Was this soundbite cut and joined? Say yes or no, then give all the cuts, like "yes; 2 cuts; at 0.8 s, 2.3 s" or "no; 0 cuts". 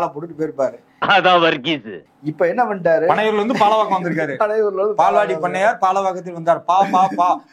no; 0 cuts